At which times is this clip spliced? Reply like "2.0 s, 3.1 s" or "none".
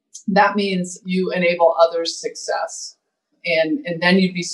1.0 s, 3.4 s